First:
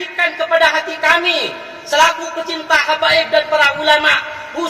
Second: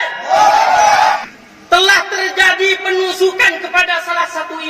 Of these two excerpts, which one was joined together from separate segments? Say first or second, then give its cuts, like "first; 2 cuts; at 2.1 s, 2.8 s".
second; 1 cut; at 1.2 s